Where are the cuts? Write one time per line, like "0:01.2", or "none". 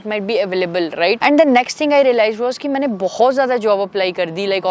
0:01.2